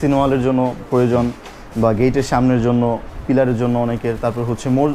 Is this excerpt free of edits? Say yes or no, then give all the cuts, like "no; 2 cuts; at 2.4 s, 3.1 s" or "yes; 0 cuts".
yes; 0 cuts